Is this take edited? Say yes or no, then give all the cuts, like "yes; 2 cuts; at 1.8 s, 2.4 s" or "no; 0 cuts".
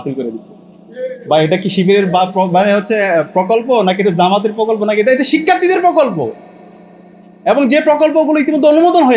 no; 0 cuts